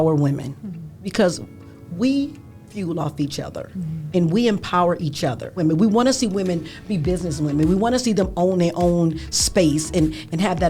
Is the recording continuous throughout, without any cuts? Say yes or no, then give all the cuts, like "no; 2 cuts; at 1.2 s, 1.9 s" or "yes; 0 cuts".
no; 1 cut; at 5.6 s